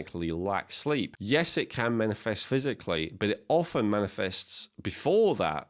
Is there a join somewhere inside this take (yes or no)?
yes